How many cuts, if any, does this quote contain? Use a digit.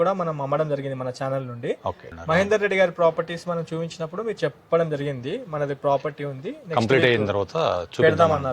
1